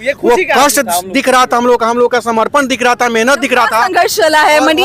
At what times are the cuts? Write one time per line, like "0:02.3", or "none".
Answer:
none